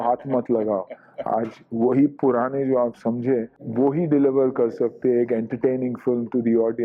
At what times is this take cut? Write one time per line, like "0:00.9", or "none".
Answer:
none